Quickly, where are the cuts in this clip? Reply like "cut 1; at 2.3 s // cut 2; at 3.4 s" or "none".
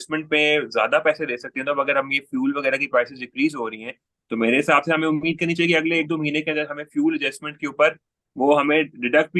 none